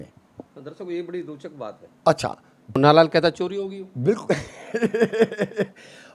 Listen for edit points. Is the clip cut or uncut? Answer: cut